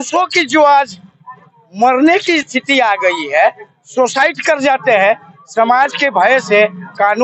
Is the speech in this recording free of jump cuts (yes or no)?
yes